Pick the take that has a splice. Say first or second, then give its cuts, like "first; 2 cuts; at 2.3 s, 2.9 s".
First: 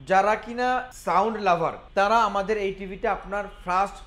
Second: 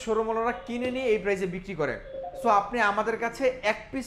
first; 2 cuts; at 0.9 s, 1.8 s